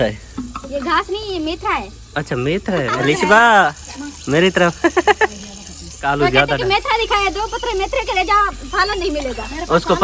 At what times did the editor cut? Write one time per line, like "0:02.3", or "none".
0:03.0
0:06.1